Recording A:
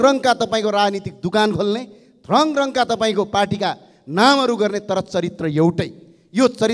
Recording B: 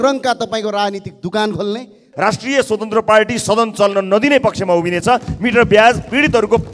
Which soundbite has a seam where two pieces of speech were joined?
B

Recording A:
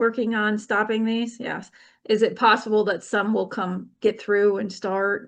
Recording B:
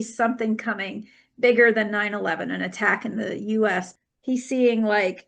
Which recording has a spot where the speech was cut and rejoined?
B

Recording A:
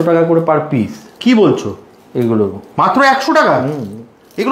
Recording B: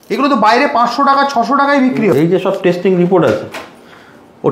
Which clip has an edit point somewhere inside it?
B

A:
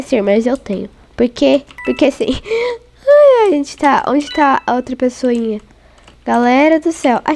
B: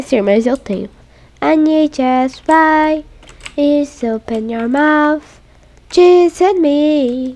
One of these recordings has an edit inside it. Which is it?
B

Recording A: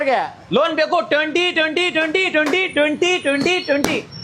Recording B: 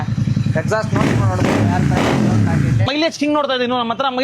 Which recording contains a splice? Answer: B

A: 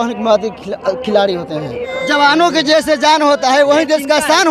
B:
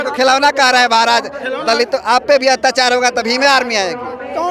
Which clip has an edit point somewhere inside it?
A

